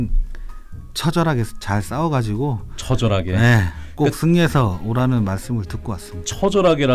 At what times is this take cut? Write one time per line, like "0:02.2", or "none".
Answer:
none